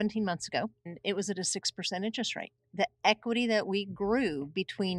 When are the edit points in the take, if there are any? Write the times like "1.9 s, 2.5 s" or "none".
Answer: 0.9 s, 2.6 s

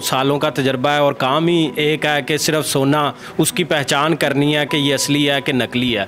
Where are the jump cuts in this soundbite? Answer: none

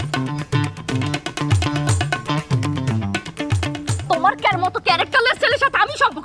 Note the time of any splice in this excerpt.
4.1 s

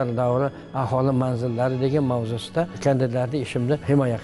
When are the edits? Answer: 2.7 s

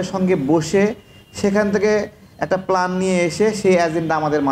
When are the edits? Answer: none

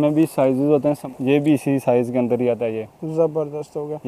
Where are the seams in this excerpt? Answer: 1.0 s

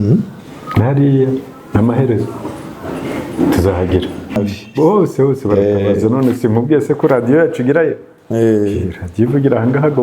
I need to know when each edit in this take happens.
4.4 s

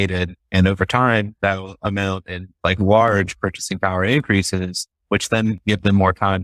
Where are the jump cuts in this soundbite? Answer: none

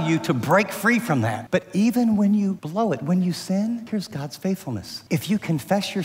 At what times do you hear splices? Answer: 1.4 s, 2.6 s, 3.8 s, 4.9 s

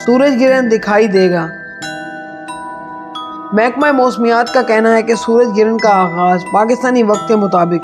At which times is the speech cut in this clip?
1.6 s, 3.2 s

